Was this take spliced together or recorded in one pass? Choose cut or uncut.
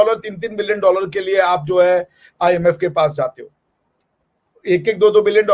uncut